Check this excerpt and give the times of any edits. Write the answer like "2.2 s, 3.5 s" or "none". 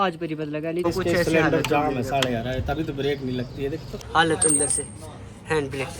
0.8 s, 4.0 s